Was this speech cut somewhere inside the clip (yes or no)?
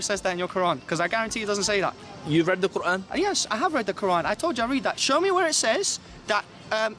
no